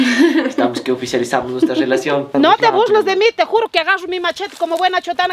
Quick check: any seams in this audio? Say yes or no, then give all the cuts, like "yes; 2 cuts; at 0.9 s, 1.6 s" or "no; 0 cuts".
yes; 1 cut; at 2.3 s